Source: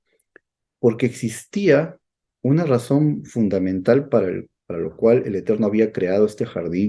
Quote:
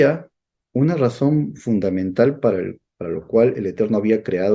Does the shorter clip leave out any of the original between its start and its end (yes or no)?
no